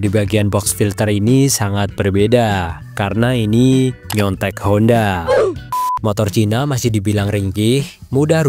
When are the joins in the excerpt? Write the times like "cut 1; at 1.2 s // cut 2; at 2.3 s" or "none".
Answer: cut 1; at 5.7 s